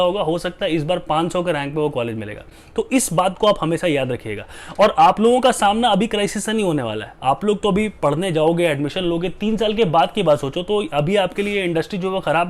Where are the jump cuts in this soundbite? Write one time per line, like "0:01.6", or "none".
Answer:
none